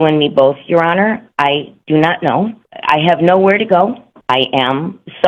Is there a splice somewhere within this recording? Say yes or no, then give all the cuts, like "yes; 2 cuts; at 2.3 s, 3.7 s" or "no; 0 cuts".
yes; 2 cuts; at 2.7 s, 4.1 s